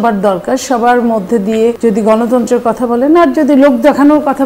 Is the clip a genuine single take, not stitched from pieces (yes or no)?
no